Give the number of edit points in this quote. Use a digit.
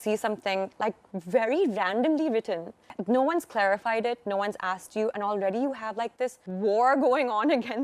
2